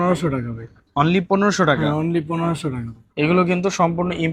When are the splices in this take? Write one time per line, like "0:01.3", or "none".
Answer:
none